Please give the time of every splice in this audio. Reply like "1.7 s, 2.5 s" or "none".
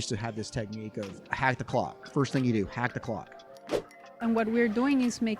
1.2 s, 3.9 s